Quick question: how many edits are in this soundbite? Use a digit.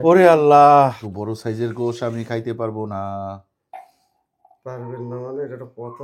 1